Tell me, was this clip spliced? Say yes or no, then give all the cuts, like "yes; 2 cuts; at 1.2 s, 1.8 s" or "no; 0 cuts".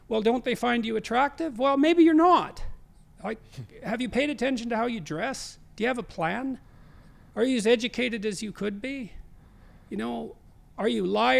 no; 0 cuts